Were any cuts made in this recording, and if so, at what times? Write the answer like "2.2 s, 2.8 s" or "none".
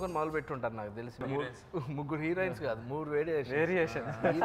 1.2 s

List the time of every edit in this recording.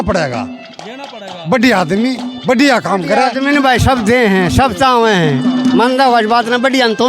none

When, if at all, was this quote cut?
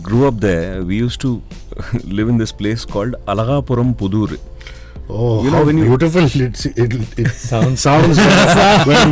none

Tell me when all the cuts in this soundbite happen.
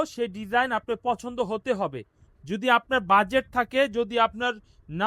none

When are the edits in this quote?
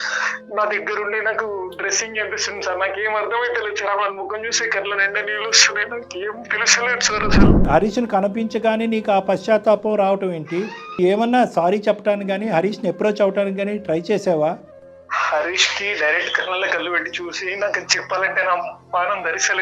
7.7 s, 11.0 s

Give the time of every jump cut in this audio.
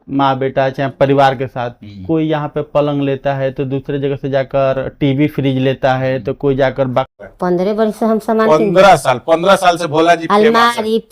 7.1 s

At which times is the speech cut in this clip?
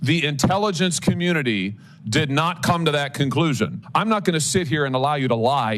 3.8 s

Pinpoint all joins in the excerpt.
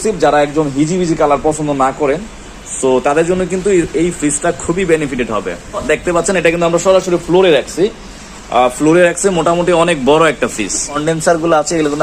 5.8 s, 11.0 s

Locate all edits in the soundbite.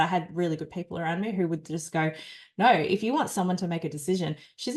none

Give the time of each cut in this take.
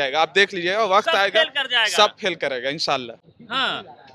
none

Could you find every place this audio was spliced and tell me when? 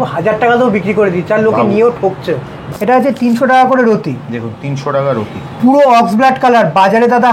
2.6 s

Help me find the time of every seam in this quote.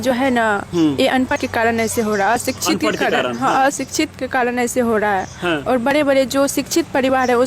1.3 s

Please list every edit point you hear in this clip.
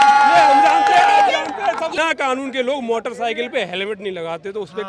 2.0 s

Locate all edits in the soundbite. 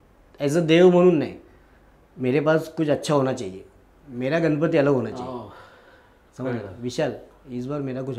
none

